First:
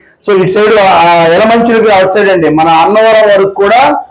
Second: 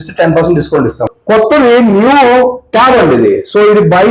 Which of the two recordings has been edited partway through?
second; 1 cut; at 1.1 s

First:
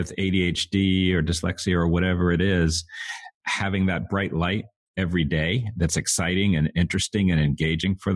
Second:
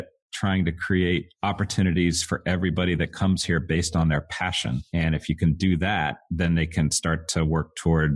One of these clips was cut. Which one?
second; 3 cuts; at 1.3 s, 4.8 s, 6.2 s

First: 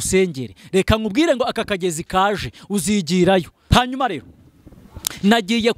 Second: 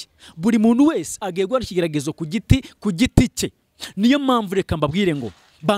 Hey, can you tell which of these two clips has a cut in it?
first; 1 cut; at 3.7 s

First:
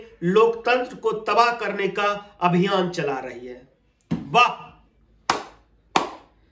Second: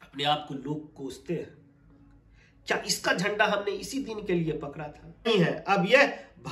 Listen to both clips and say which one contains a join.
second; 1 cut; at 5.3 s

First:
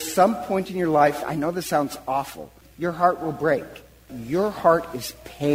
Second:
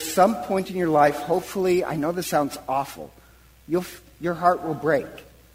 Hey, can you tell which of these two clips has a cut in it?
first; 3 cuts; at 1.2 s, 2.6 s, 4.2 s

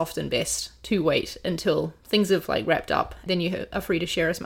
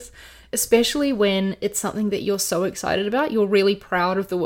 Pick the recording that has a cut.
first; 1 cut; at 3.3 s

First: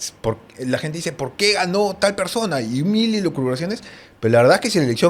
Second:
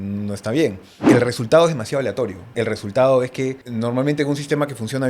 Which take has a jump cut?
second; 3 cuts; at 1.0 s, 2.4 s, 3.6 s

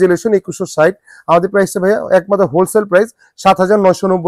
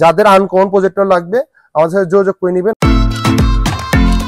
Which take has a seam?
second; 1 cut; at 2.7 s

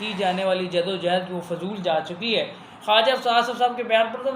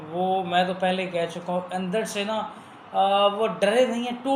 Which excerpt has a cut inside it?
first; 1 cut; at 2.7 s

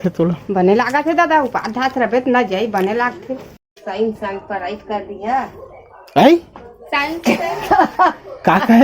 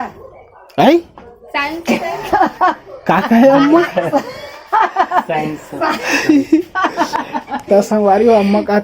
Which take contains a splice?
first; 1 cut; at 3.7 s

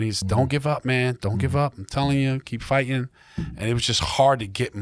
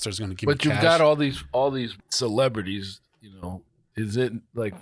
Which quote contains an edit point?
second; 2 cuts; at 2.0 s, 3.9 s

